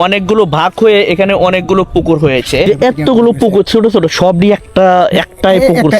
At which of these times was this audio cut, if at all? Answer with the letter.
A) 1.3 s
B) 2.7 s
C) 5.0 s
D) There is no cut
B